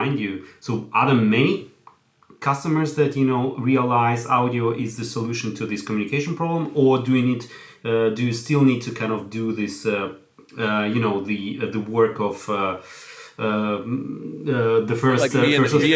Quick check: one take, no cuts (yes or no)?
yes